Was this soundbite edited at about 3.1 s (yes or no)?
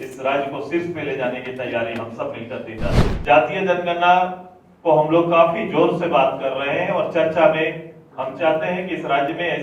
yes